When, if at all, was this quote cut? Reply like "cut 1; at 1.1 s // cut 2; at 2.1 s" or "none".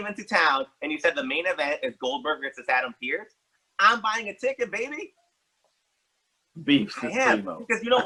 none